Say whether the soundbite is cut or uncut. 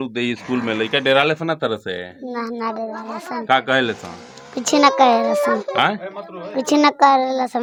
uncut